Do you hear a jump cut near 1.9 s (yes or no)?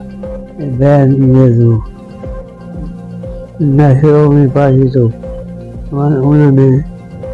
yes